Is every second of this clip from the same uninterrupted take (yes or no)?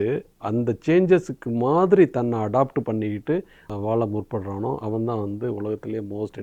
no